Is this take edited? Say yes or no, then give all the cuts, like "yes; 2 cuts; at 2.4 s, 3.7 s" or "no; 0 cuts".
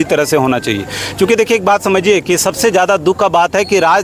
no; 0 cuts